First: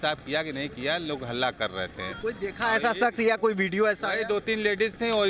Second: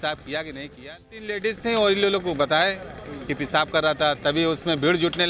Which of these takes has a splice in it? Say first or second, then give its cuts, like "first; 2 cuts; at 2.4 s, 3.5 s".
second; 1 cut; at 1.3 s